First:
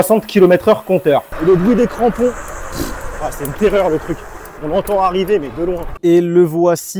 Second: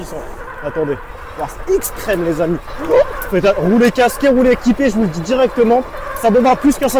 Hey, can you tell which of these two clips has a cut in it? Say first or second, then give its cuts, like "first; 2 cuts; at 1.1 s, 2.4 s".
first; 2 cuts; at 1.3 s, 5.9 s